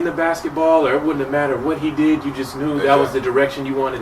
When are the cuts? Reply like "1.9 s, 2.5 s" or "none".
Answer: none